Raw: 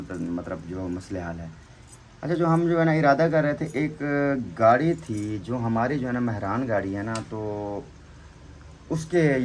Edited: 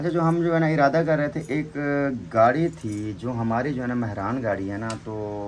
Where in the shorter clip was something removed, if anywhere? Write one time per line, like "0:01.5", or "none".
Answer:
none